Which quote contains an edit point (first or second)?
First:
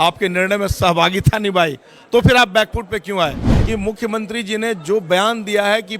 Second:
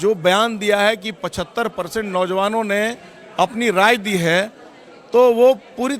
first